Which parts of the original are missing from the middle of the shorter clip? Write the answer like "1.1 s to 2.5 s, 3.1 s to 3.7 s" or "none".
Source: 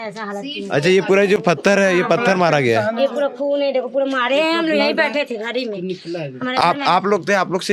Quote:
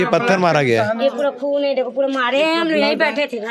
none